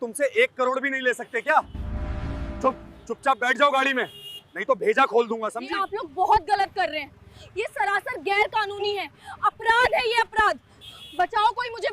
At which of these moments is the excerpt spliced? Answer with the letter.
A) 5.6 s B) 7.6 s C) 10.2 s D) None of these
A